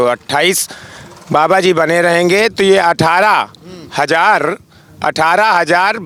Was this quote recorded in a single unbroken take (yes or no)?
yes